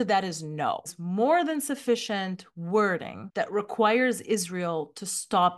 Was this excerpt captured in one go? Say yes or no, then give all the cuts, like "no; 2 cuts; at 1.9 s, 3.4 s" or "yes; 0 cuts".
no; 1 cut; at 0.9 s